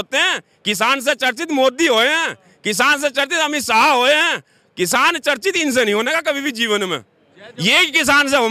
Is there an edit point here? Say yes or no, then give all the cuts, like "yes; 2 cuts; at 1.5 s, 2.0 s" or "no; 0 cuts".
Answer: no; 0 cuts